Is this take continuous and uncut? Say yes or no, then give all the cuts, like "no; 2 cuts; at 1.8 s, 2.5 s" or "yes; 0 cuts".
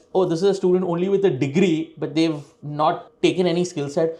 yes; 0 cuts